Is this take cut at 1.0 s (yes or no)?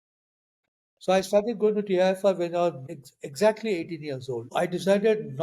no